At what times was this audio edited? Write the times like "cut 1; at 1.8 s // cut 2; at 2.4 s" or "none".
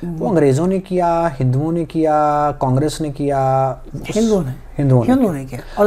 none